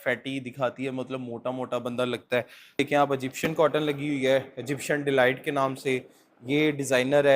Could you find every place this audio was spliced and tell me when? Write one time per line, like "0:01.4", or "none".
0:02.8